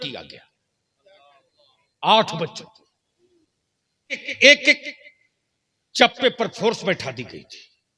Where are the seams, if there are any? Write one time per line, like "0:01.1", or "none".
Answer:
0:04.3